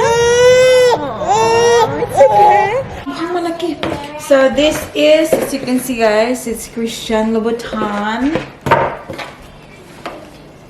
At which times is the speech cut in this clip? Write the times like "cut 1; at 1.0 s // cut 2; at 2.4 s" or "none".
cut 1; at 3.0 s